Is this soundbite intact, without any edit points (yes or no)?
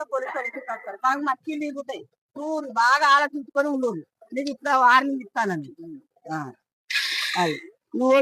yes